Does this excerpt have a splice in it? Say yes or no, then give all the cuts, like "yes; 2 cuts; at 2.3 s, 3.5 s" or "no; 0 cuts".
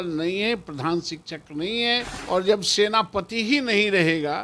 yes; 1 cut; at 2.1 s